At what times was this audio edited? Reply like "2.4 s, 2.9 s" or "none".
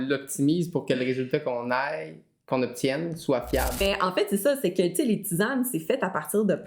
3.8 s